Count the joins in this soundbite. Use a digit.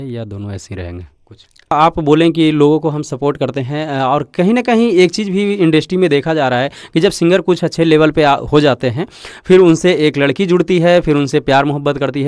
1